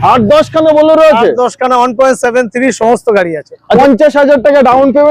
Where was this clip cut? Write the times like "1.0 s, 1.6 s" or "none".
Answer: 3.8 s